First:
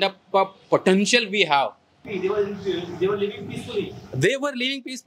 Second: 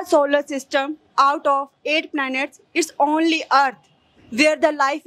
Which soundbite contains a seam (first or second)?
first